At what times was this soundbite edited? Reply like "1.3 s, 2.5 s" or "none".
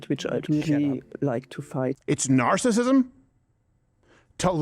2.0 s